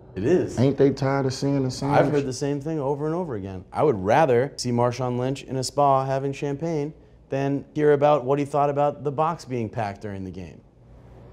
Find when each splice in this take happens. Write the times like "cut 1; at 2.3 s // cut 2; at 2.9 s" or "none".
cut 1; at 4.6 s // cut 2; at 7.7 s